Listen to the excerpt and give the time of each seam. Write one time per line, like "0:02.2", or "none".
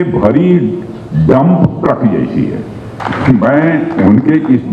0:03.0